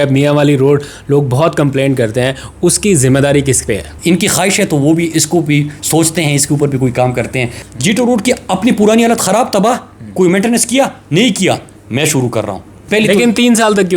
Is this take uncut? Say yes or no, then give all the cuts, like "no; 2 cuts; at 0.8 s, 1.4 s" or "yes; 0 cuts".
no; 3 cuts; at 3.9 s, 7.6 s, 12.8 s